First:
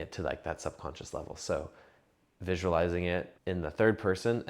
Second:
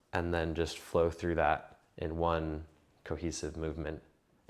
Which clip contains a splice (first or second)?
first